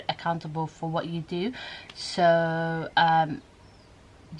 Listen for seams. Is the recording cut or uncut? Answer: uncut